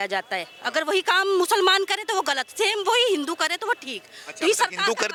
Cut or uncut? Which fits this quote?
uncut